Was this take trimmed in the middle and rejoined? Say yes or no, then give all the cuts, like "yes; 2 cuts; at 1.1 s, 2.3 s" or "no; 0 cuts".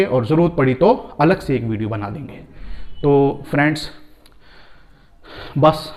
no; 0 cuts